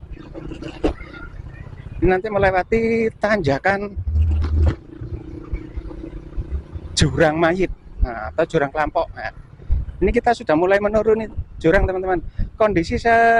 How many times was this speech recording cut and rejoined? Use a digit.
0